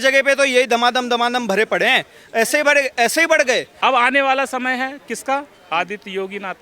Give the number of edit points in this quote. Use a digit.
1